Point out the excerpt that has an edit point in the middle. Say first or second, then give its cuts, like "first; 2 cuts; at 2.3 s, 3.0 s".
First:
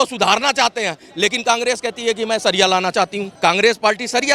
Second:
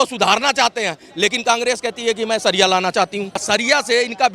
second; 1 cut; at 3.3 s